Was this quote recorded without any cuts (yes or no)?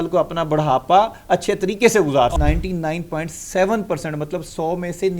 no